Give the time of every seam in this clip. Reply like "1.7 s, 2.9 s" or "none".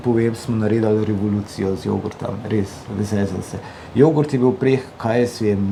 none

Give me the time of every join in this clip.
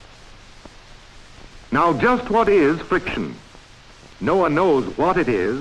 2.3 s

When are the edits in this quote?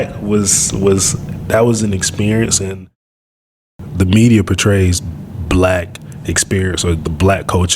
3.4 s

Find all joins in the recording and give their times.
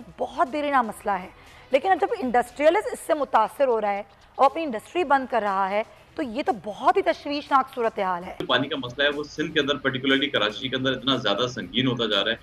8.4 s

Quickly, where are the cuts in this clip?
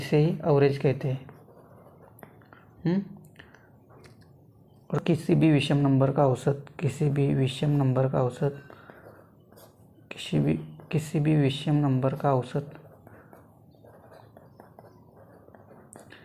5.0 s

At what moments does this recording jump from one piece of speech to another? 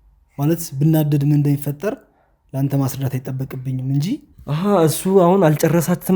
4.4 s

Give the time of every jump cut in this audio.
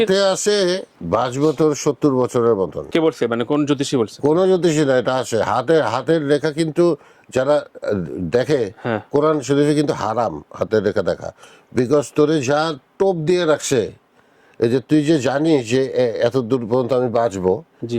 0.9 s, 2.8 s

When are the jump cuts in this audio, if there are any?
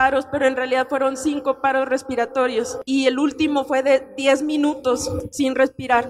2.8 s, 5.2 s

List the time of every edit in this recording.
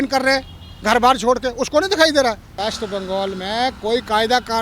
2.5 s

